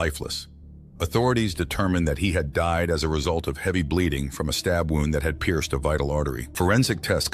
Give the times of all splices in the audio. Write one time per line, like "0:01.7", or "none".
0:06.4